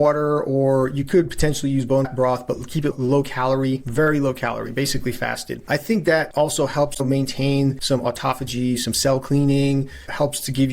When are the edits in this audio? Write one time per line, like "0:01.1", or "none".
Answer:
0:05.6
0:06.3
0:07.8